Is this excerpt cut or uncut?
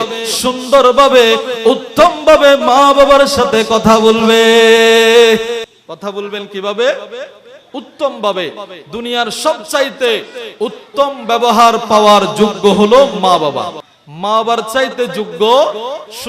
cut